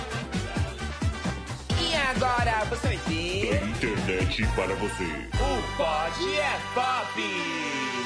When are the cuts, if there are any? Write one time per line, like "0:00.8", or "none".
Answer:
none